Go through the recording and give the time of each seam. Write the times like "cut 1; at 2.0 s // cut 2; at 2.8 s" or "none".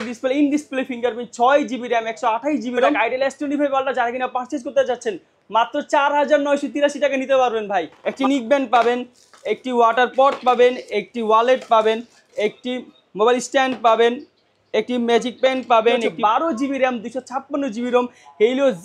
cut 1; at 3.0 s // cut 2; at 8.0 s // cut 3; at 16.1 s